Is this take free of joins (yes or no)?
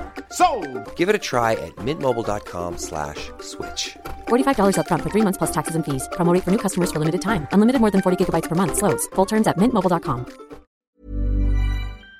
no